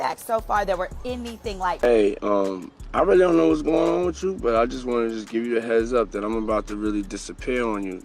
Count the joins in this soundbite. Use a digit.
1